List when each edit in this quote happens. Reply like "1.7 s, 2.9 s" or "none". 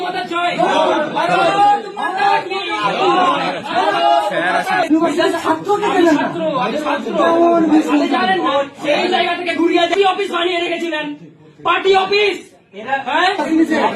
4.9 s